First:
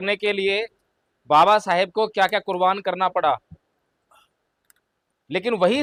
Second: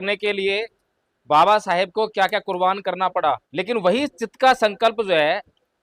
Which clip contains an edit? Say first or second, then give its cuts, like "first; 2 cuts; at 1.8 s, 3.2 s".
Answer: second; 1 cut; at 3.5 s